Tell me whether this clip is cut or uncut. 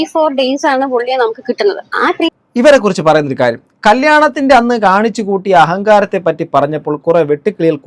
cut